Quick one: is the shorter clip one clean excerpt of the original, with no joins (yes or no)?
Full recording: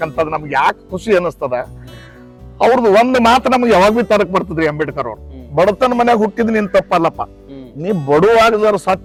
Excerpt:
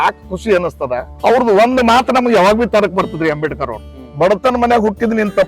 no